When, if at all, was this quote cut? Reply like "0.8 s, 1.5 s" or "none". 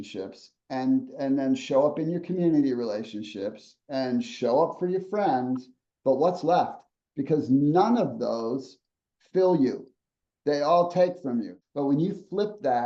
11.6 s